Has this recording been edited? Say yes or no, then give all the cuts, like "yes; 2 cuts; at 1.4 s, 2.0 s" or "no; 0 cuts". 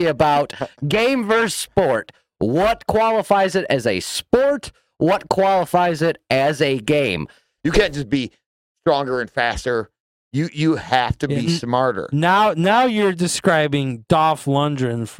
yes; 1 cut; at 7.5 s